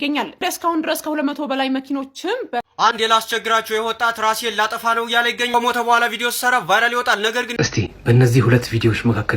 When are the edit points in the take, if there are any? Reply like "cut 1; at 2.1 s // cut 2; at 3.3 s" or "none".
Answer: cut 1; at 2.7 s // cut 2; at 7.5 s